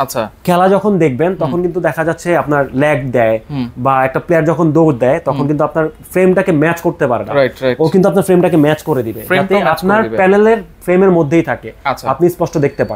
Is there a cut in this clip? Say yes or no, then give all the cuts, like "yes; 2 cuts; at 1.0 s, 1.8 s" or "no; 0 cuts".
no; 0 cuts